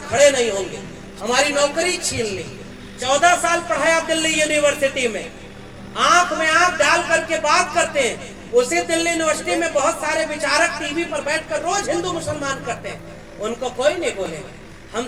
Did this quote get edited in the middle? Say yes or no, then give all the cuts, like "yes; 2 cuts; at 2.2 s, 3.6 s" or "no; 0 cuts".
no; 0 cuts